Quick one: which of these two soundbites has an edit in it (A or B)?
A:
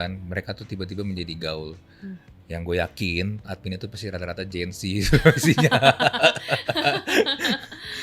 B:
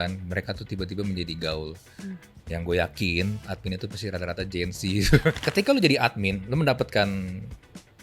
B